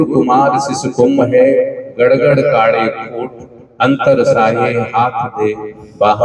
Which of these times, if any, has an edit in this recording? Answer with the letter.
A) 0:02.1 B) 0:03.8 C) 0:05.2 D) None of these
D